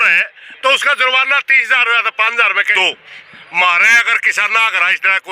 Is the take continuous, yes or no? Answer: no